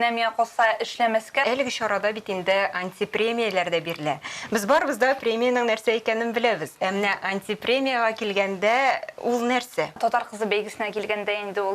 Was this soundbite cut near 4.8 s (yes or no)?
no